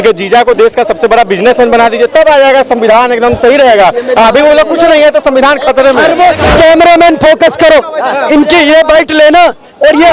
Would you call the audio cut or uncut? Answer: cut